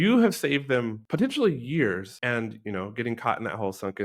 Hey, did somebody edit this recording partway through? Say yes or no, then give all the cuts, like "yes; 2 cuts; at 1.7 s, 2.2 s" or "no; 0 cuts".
yes; 2 cuts; at 1.0 s, 2.1 s